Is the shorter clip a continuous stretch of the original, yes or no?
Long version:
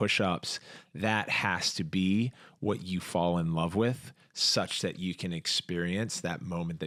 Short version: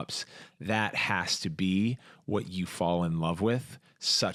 yes